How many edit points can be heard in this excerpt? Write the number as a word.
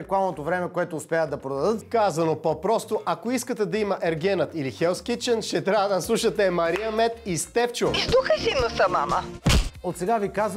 three